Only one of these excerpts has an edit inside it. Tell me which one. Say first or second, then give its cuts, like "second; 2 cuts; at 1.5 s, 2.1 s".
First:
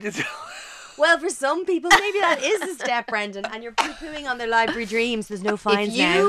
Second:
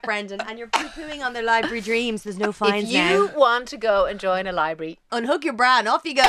second; 1 cut; at 5.1 s